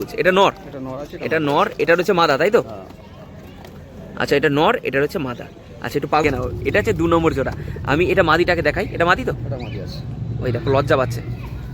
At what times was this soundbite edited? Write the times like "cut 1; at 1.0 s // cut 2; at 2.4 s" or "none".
cut 1; at 6.2 s